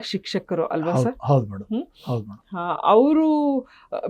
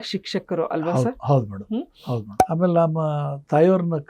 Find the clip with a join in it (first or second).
second